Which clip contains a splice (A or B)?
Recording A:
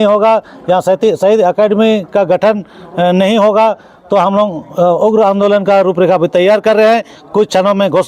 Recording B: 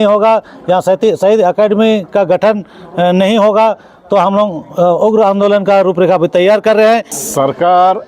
B